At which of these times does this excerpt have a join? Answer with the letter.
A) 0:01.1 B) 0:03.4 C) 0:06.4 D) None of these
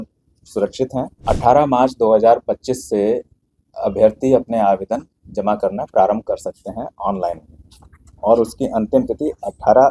A